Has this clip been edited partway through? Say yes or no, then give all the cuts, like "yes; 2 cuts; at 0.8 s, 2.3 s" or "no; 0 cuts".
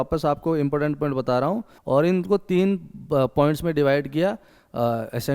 yes; 1 cut; at 1.7 s